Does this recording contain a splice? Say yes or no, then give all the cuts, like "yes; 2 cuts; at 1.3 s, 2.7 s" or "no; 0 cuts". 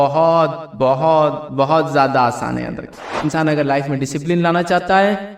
yes; 1 cut; at 3.2 s